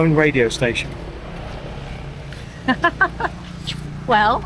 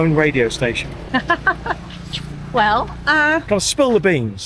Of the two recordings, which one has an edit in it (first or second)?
second